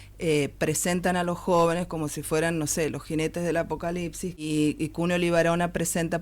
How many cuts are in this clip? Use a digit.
1